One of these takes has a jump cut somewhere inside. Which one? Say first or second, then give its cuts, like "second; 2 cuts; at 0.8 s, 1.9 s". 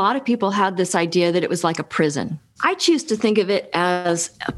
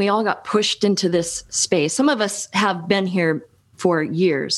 first; 1 cut; at 2.4 s